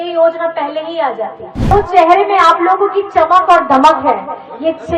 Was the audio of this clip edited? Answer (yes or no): yes